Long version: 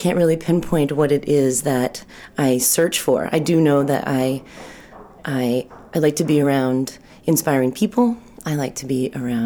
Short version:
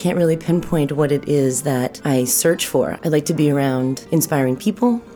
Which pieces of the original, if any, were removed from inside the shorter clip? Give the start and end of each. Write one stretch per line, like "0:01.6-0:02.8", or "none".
0:02.0-0:02.3
0:03.3-0:05.8
0:06.9-0:07.2